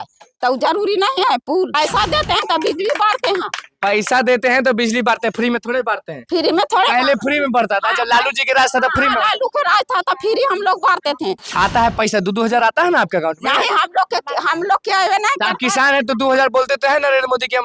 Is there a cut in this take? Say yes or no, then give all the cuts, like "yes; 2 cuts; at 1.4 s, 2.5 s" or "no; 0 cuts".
yes; 2 cuts; at 1.8 s, 11.4 s